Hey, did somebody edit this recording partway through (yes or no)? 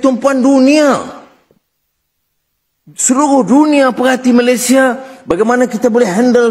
no